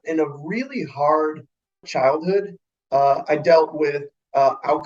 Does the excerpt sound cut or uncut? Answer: cut